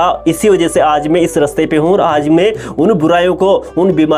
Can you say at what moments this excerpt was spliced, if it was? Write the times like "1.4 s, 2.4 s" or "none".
none